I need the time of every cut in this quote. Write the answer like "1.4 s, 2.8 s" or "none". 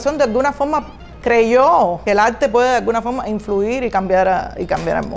2.0 s

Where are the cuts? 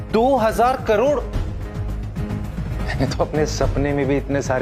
2.7 s

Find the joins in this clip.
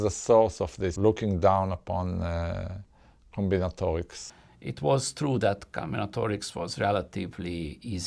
0.9 s, 4.2 s

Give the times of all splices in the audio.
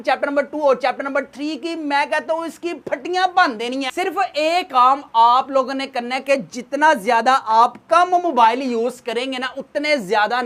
3.9 s

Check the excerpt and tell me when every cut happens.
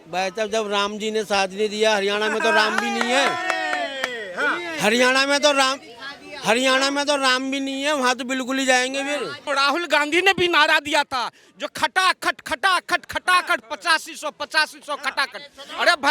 9.4 s

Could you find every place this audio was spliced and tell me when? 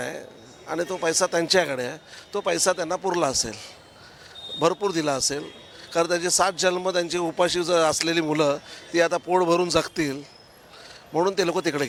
none

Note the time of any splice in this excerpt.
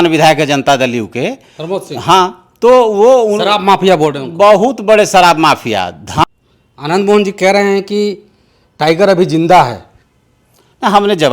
6.2 s

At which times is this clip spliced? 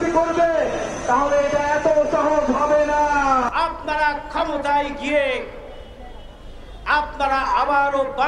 3.5 s

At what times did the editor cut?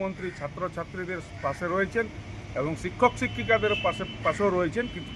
none

